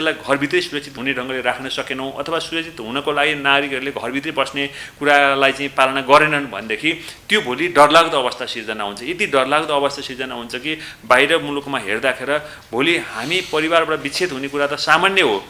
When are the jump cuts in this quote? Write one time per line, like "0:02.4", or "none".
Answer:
none